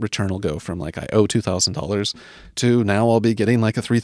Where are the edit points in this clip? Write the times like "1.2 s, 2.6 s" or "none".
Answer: none